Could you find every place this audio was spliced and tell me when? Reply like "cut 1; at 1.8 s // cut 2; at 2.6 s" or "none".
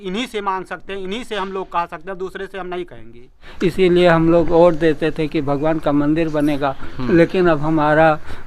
cut 1; at 3.5 s